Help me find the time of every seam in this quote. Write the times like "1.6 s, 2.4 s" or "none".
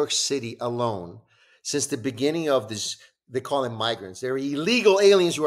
none